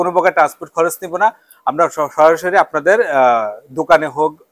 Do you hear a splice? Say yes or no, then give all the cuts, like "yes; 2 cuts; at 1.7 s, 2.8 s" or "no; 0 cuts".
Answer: no; 0 cuts